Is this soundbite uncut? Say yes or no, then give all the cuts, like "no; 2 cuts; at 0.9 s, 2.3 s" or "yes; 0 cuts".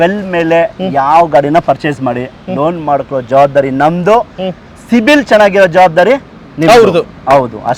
yes; 0 cuts